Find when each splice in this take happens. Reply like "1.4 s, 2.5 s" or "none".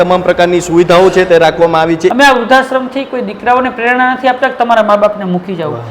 2.1 s